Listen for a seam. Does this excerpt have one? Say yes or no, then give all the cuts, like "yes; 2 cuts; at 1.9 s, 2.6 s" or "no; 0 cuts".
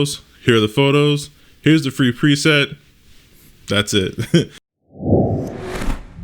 yes; 1 cut; at 4.7 s